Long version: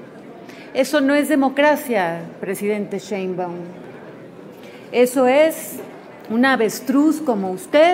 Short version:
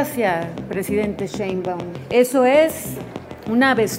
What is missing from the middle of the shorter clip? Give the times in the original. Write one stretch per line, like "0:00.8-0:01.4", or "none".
0:03.7-0:04.8